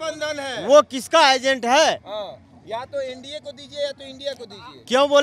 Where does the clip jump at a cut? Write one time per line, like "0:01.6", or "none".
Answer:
none